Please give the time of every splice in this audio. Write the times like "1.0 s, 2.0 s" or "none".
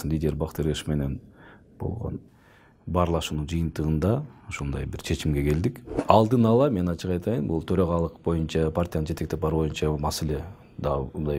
2.2 s, 5.9 s

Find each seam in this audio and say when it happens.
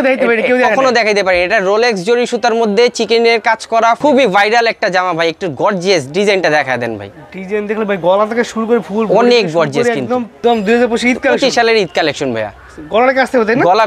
4.0 s, 10.3 s

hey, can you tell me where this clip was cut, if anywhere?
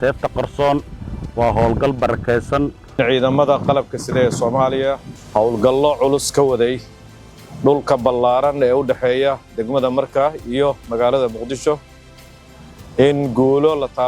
3.0 s, 5.1 s

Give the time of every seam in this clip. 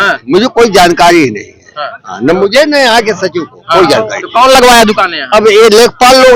none

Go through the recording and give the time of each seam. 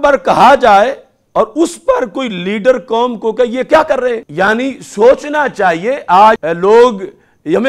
4.3 s, 6.5 s

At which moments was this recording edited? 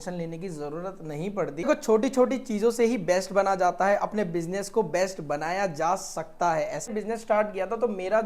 1.6 s, 6.9 s

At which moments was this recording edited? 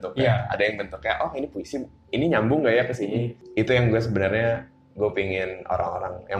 3.4 s

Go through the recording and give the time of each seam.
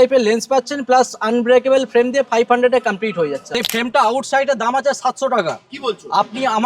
3.6 s

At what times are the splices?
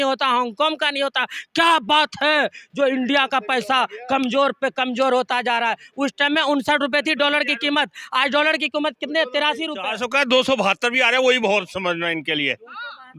9.8 s

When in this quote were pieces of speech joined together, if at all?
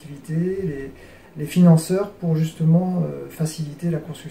none

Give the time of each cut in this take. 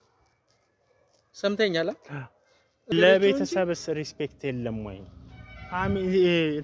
2.9 s

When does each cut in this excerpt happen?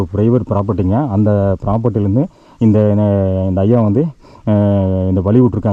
none

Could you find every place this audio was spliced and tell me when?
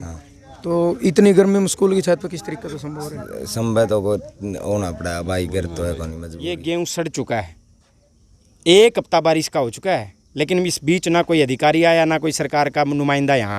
6.3 s

